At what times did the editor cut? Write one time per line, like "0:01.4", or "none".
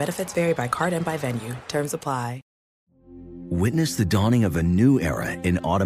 none